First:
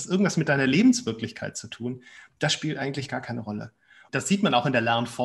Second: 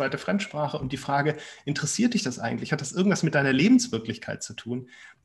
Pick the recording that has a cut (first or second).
first